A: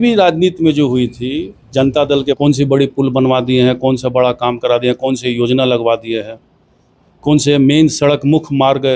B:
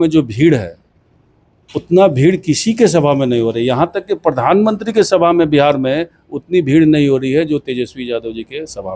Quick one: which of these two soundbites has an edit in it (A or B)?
A